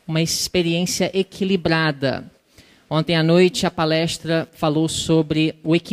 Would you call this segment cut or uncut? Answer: cut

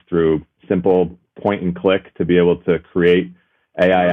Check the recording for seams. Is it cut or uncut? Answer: uncut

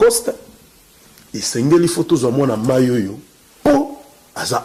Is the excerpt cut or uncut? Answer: uncut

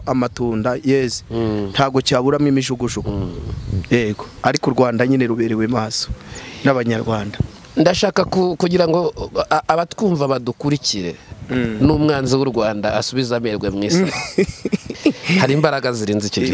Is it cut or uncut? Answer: uncut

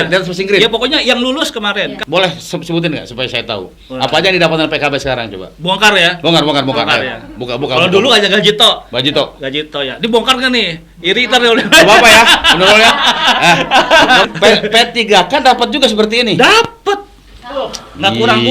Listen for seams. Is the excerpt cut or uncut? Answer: cut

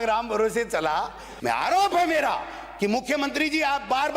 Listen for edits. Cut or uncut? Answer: cut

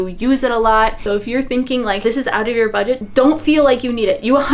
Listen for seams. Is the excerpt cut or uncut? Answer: cut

